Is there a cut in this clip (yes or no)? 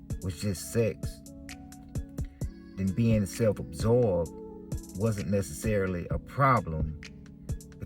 no